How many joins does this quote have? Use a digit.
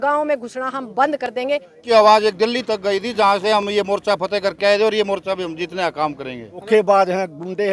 2